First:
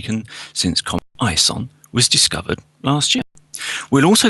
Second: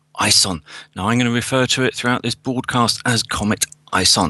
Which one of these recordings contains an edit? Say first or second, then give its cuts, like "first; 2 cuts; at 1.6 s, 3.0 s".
first; 1 cut; at 1.7 s